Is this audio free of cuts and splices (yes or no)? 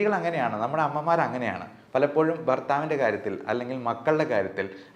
yes